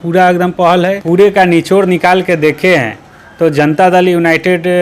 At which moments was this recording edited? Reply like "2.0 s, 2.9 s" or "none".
1.0 s